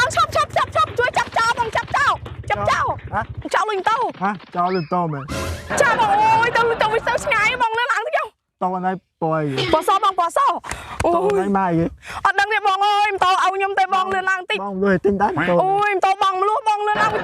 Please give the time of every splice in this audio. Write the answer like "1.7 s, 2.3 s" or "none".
3.5 s